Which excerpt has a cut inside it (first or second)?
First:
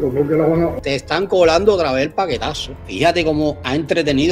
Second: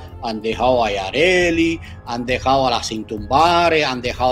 first